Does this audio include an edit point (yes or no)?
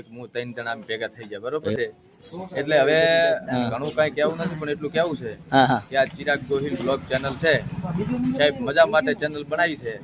no